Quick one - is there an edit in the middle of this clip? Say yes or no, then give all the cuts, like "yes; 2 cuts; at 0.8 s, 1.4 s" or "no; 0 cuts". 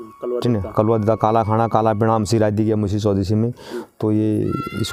no; 0 cuts